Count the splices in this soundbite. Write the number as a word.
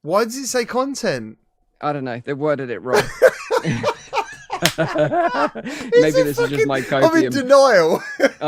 zero